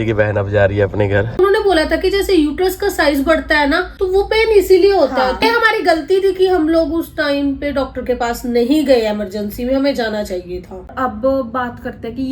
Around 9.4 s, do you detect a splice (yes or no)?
no